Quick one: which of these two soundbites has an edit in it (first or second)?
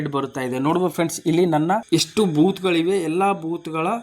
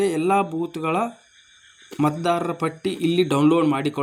first